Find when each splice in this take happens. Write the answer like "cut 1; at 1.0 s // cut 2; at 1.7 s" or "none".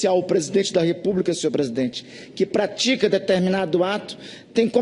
cut 1; at 3.9 s